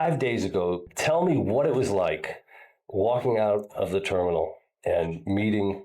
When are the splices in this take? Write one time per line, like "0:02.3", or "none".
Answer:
0:00.9